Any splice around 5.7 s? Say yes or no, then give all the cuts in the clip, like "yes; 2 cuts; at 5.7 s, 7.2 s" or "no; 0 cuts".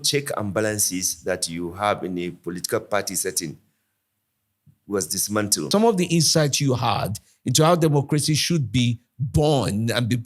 yes; 1 cut; at 5.7 s